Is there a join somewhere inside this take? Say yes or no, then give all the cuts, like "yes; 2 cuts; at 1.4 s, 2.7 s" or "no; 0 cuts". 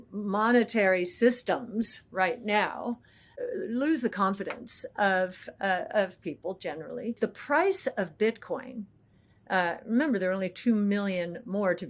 yes; 1 cut; at 7.2 s